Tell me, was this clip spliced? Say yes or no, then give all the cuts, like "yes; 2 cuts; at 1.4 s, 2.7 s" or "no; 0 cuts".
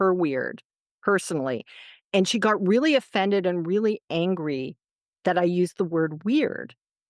no; 0 cuts